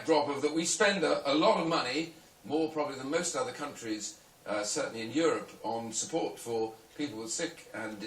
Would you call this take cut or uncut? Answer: cut